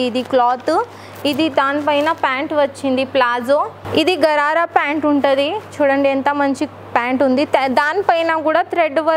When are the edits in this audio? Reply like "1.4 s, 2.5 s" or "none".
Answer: 3.8 s